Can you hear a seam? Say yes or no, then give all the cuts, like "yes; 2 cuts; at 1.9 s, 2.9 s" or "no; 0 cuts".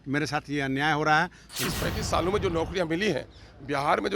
yes; 1 cut; at 1.6 s